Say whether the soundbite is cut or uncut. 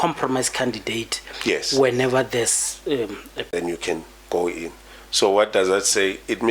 cut